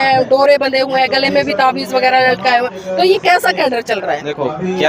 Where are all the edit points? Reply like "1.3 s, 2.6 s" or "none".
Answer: none